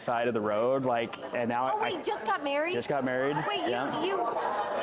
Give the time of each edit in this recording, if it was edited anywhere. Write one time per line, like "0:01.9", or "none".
0:01.3